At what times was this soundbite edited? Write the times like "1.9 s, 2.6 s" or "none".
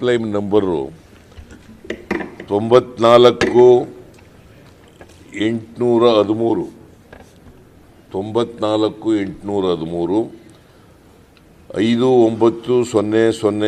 none